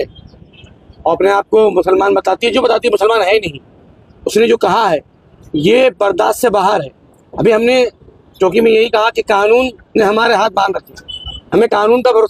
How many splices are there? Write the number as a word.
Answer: zero